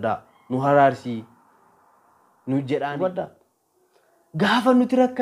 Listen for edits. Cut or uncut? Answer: cut